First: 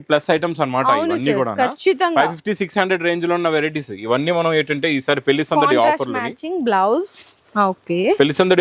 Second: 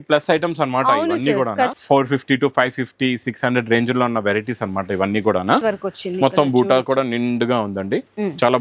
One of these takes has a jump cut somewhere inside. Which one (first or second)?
second